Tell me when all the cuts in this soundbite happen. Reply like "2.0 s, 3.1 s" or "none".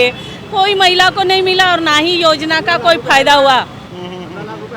none

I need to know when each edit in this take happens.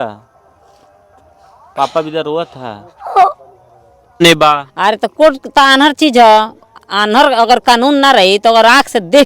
4.2 s

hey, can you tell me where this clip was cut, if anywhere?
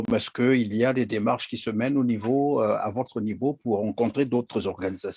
none

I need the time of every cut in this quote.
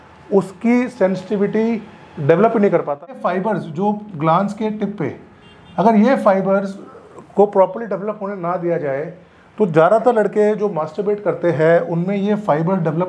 3.0 s

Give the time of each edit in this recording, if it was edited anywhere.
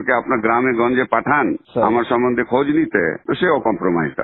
1.6 s, 3.2 s

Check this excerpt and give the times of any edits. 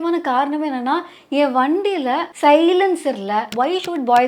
2.3 s, 3.5 s

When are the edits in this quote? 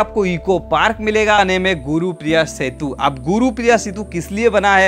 1.4 s

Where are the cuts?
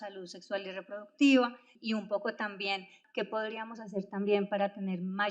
1.7 s, 2.9 s

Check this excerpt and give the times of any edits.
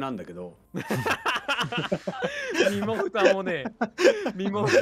none

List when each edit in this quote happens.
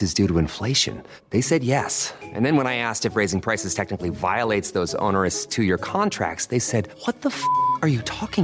none

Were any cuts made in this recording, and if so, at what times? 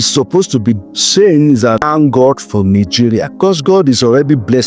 1.8 s, 3.3 s

